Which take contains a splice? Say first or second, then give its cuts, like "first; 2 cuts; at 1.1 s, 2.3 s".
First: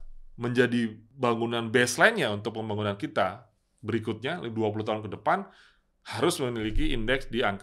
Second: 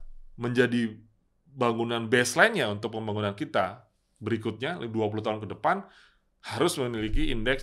first; 1 cut; at 1.0 s